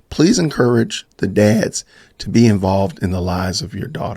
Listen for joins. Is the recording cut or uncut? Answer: cut